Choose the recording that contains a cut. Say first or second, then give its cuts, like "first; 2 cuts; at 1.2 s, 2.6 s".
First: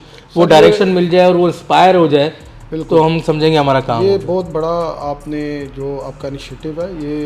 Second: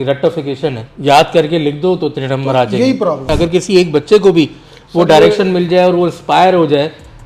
second; 1 cut; at 3.3 s